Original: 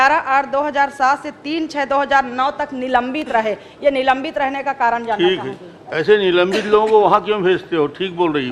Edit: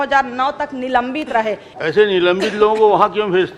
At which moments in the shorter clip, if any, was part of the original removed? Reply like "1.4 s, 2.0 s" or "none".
1.7 s